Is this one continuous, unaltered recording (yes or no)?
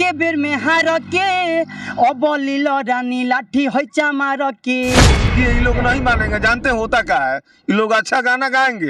no